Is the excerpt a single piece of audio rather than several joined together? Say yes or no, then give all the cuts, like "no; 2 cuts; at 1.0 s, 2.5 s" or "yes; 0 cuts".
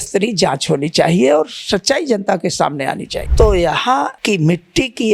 no; 2 cuts; at 3.2 s, 4.2 s